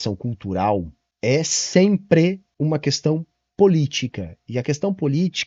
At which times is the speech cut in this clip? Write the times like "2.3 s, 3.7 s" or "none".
1.0 s, 2.5 s